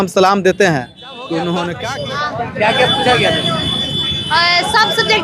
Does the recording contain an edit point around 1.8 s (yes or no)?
yes